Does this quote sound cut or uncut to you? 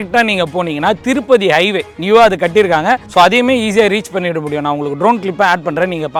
uncut